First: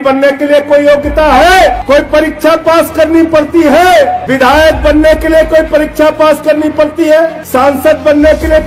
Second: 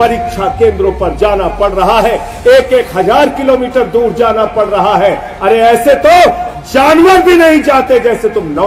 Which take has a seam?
first; 3 cuts; at 1.8 s, 4.2 s, 7.4 s

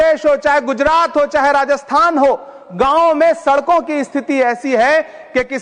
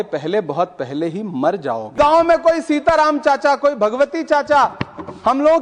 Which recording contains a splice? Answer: second; 1 cut; at 2.0 s

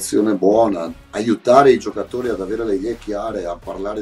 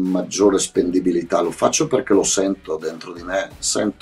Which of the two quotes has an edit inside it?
first; 1 cut; at 0.9 s

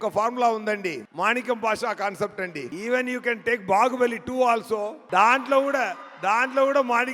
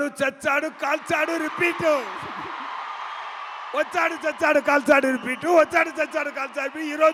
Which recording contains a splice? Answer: first; 3 cuts; at 1.0 s, 2.7 s, 5.0 s

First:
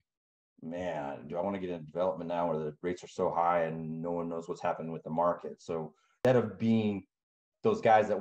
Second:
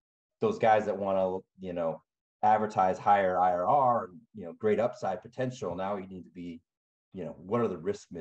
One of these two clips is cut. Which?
first; 1 cut; at 6.2 s

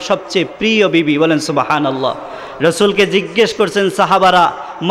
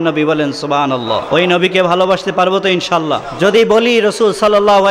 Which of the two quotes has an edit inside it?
second; 2 cuts; at 1.2 s, 3.3 s

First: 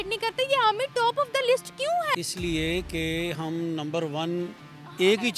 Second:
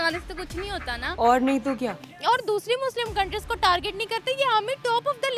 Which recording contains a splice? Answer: second; 2 cuts; at 1.1 s, 2.1 s

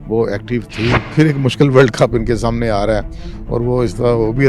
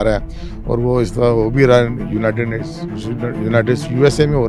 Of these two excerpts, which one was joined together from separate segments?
first; 1 cut; at 1.1 s

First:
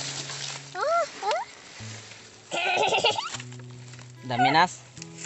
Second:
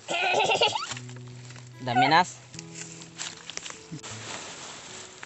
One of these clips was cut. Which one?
second; 1 cut; at 4.0 s

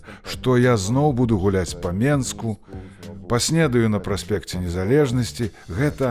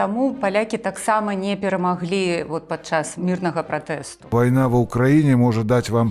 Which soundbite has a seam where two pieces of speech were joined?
second; 2 cuts; at 3.1 s, 4.3 s

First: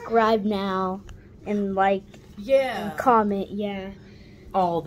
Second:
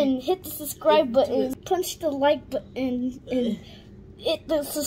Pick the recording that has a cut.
second; 1 cut; at 1.6 s

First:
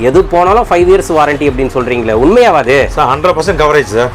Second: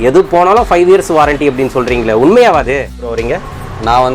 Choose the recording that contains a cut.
second; 1 cut; at 3.2 s

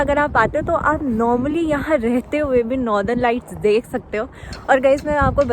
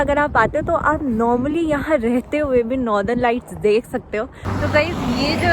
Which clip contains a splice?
second; 1 cut; at 4.6 s

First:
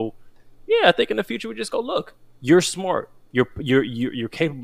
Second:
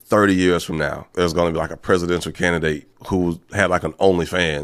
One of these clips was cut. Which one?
second; 2 cuts; at 1.1 s, 2.9 s

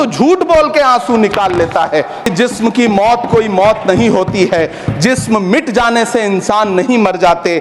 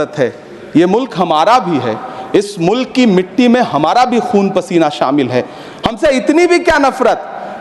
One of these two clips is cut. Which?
first; 1 cut; at 2.3 s

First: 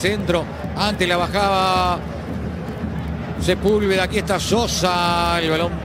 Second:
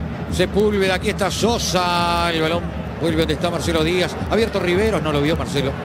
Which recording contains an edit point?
first; 1 cut; at 1.8 s

